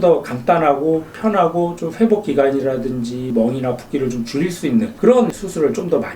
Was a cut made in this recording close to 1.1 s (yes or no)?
no